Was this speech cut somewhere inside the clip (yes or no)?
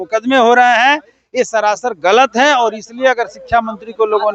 no